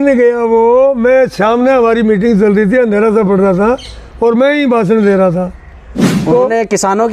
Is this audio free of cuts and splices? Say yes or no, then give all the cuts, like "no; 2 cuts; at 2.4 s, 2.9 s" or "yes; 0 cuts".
yes; 0 cuts